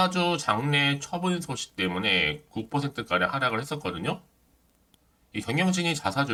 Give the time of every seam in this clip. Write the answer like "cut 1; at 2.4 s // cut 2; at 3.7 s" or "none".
none